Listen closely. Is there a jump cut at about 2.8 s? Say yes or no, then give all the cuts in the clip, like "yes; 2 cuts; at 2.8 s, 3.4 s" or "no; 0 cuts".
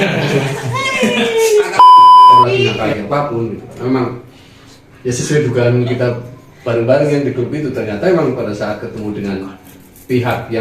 yes; 1 cut; at 2.8 s